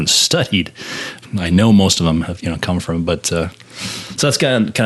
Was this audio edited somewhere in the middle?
yes; 1 cut; at 1.2 s

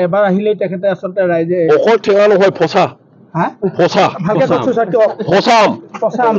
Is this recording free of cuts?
yes; 0 cuts

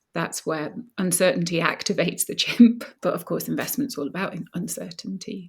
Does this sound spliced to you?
yes; 1 cut; at 2.9 s

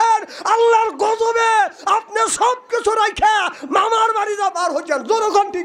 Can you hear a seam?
no; 0 cuts

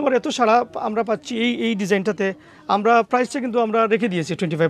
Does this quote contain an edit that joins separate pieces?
no; 0 cuts

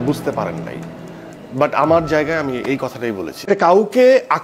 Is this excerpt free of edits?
no; 1 cut; at 3.5 s

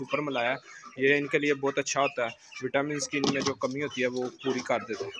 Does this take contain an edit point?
no; 0 cuts

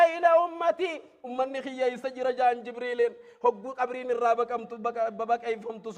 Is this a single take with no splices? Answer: yes; 0 cuts

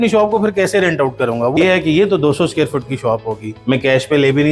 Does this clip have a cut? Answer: yes; 2 cuts; at 1.5 s, 3.5 s

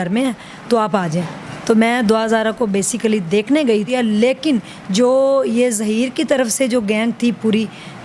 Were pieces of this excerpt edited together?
yes; 1 cut; at 3.9 s

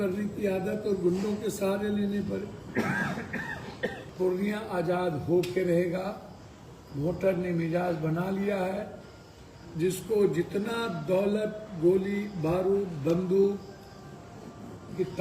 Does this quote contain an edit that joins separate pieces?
yes; 1 cut; at 4.0 s

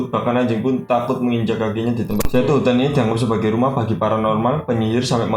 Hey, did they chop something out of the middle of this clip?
yes; 1 cut; at 2.2 s

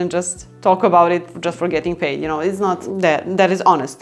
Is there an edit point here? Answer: yes; 2 cuts; at 1.3 s, 2.8 s

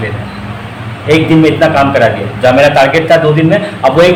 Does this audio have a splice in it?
no; 0 cuts

